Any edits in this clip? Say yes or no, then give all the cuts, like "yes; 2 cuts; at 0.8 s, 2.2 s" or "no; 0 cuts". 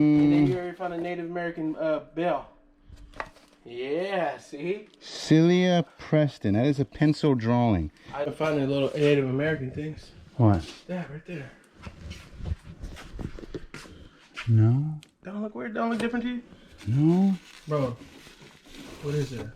yes; 1 cut; at 8.3 s